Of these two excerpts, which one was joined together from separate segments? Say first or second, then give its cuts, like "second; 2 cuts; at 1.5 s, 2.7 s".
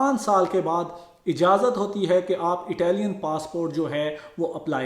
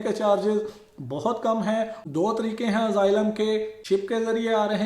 second; 2 cuts; at 2.0 s, 3.8 s